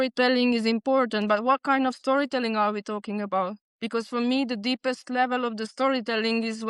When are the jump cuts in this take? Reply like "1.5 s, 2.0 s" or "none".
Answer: none